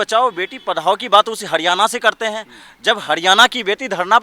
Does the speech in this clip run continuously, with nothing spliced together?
yes; 0 cuts

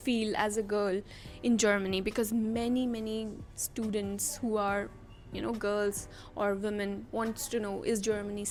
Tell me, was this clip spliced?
no; 0 cuts

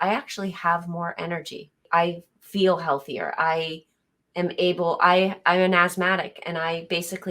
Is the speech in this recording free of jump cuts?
no; 1 cut; at 1.8 s

